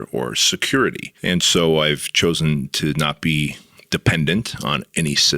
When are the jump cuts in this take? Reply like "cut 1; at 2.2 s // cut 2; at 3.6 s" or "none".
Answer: cut 1; at 1.1 s